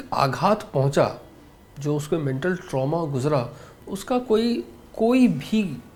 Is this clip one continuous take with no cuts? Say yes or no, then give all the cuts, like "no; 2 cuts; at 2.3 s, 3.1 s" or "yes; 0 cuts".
yes; 0 cuts